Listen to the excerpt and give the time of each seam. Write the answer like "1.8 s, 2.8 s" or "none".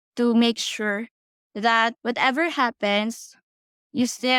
none

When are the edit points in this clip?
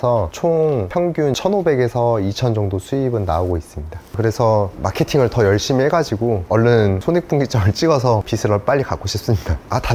none

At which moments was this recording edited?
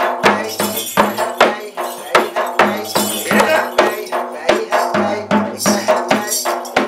none

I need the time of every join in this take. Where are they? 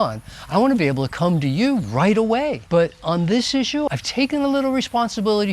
2.6 s, 3.9 s

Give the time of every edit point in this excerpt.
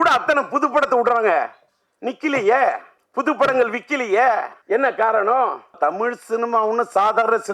2.9 s, 4.6 s, 5.8 s

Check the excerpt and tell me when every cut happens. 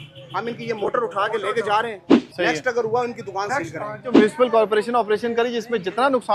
2.1 s, 4.1 s

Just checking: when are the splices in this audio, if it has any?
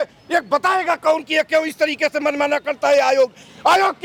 none

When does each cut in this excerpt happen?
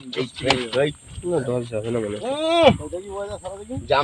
none

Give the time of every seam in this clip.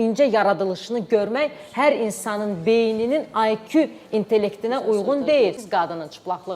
5.6 s

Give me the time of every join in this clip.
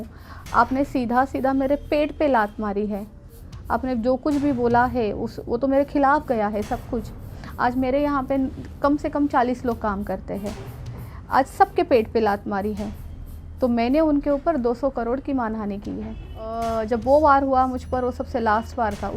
16.6 s

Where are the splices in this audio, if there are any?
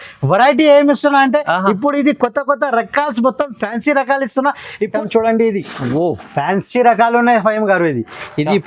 4.8 s

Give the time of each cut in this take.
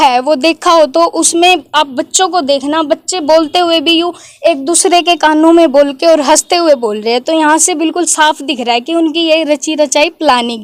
none

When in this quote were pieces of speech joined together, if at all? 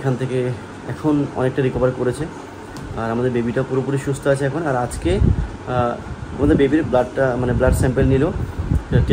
none

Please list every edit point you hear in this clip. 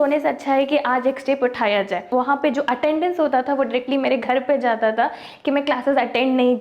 2.0 s

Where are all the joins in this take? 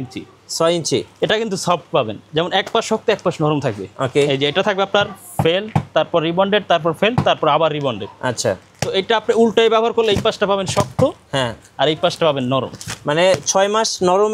none

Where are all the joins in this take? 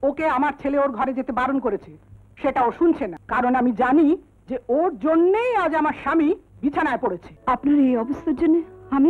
3.2 s, 7.3 s

